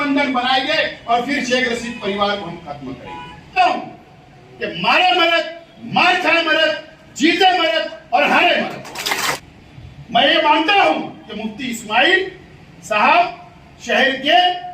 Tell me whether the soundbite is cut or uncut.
cut